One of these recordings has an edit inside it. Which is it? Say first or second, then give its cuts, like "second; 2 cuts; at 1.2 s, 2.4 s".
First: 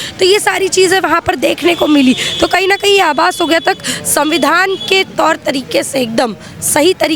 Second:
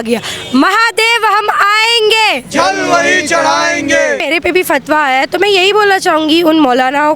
second; 1 cut; at 4.2 s